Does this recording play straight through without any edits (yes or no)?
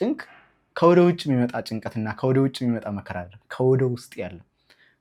yes